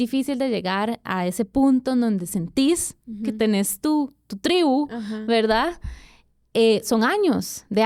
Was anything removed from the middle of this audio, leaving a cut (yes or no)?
no